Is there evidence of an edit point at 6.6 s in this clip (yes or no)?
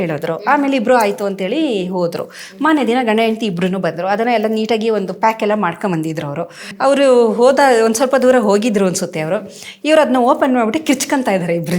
yes